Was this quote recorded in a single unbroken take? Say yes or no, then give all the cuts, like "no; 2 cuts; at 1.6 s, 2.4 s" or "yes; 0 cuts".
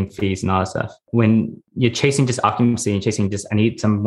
no; 2 cuts; at 1.0 s, 1.6 s